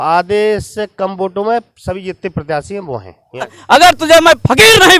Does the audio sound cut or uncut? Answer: cut